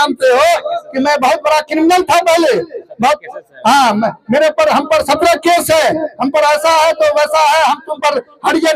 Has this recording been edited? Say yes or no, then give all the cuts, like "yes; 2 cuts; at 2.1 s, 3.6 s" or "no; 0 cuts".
no; 0 cuts